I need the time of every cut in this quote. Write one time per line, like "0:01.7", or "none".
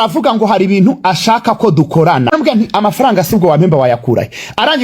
0:02.3